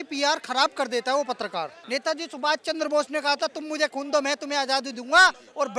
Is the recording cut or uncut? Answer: cut